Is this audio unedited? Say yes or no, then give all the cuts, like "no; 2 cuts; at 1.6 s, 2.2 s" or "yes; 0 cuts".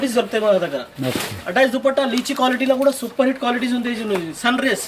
yes; 0 cuts